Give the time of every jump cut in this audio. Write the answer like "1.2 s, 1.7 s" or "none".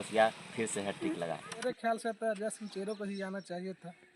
1.5 s